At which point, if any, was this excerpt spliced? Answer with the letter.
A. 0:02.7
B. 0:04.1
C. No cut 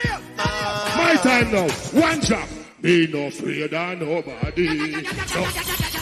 C